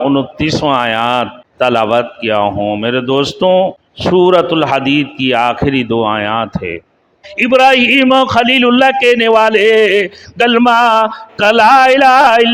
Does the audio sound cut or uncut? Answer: cut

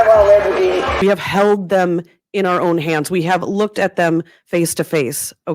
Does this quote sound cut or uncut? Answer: cut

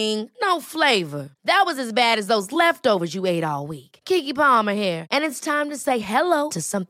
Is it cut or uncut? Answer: uncut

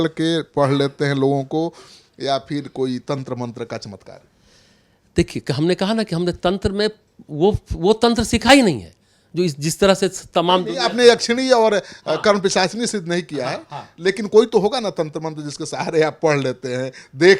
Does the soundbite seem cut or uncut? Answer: uncut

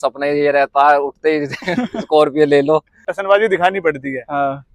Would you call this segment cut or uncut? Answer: cut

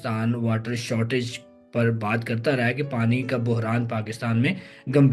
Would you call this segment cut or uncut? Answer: uncut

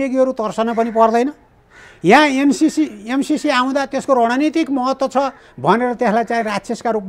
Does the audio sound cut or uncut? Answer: uncut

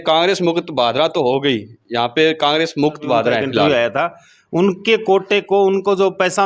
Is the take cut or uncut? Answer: cut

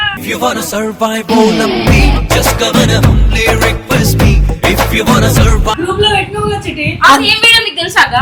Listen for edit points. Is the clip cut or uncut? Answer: uncut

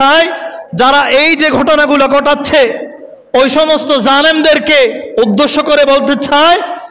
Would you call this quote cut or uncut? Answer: uncut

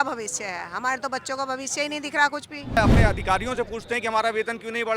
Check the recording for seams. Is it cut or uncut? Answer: cut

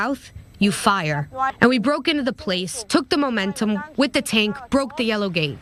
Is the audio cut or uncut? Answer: uncut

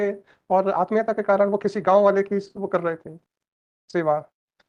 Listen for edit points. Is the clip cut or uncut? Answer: uncut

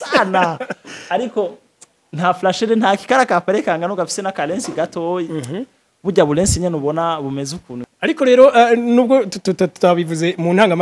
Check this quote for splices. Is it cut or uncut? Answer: cut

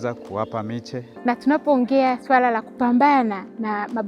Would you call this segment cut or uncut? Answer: cut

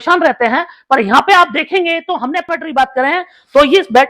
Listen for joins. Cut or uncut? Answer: cut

